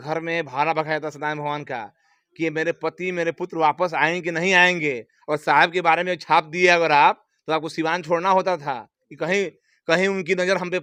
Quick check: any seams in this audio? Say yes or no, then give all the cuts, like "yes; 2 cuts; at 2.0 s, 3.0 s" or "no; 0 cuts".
no; 0 cuts